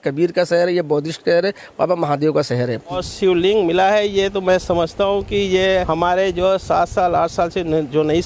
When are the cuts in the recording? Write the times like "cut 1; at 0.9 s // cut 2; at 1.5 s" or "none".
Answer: cut 1; at 3.0 s // cut 2; at 5.9 s